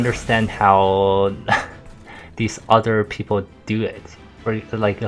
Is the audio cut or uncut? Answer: uncut